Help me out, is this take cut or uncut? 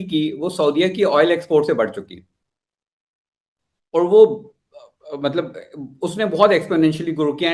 uncut